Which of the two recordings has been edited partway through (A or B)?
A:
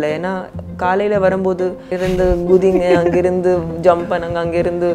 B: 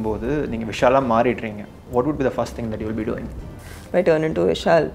B